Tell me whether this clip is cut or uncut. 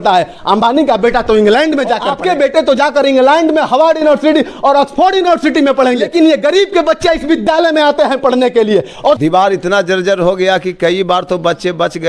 cut